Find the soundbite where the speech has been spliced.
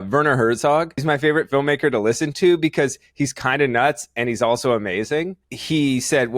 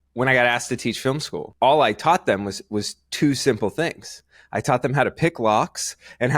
first; 2 cuts; at 1.0 s, 5.5 s

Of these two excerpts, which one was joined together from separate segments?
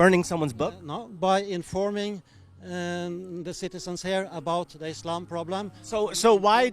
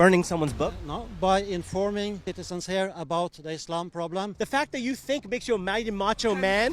second; 2 cuts; at 2.3 s, 4.4 s

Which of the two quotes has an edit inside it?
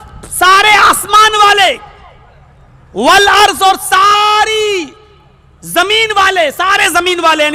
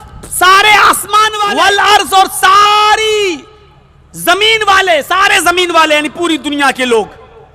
second; 1 cut; at 1.4 s

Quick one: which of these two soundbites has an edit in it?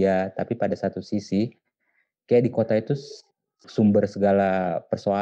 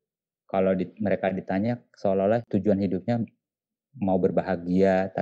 second; 1 cut; at 2.4 s

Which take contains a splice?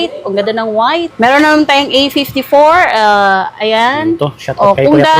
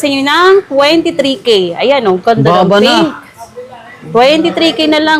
first; 1 cut; at 1.1 s

